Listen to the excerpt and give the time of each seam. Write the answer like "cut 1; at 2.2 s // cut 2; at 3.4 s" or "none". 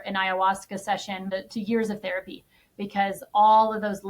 cut 1; at 1.3 s